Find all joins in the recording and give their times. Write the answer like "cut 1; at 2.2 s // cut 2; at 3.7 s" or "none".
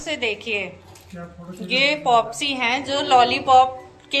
none